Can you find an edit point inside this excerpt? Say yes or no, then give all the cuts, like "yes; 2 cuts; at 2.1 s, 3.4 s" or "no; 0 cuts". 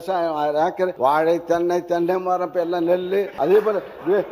yes; 2 cuts; at 0.9 s, 3.3 s